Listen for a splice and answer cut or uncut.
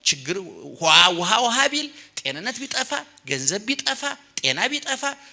uncut